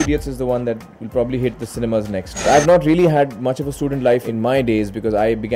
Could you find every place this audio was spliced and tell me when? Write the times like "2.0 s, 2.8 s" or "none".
2.4 s